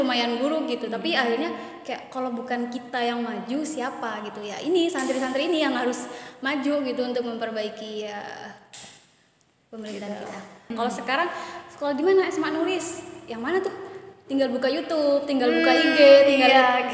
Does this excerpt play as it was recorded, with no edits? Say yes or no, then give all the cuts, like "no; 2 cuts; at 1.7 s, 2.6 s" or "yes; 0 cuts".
no; 1 cut; at 10.7 s